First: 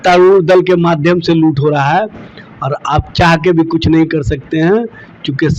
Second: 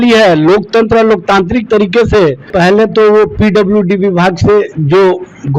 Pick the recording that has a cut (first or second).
second